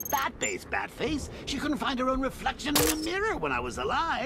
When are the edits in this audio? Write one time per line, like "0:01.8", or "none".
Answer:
none